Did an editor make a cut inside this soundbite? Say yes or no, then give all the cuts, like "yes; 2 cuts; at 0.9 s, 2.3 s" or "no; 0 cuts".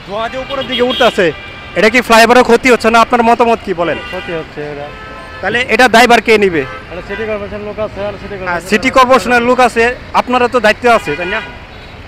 no; 0 cuts